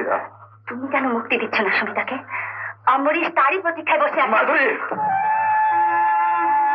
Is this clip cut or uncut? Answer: uncut